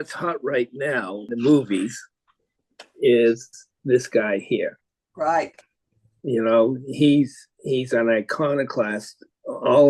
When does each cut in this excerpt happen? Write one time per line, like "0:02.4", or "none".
0:01.3